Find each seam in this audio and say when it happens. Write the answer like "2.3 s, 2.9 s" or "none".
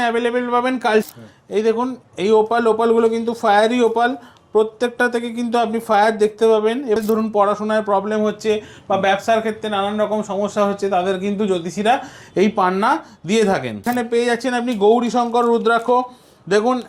1.0 s, 7.0 s, 13.9 s